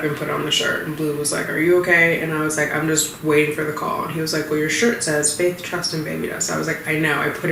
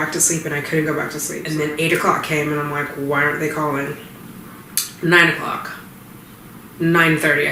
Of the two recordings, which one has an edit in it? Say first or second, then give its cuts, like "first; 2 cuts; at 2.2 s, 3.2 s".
second; 1 cut; at 1.3 s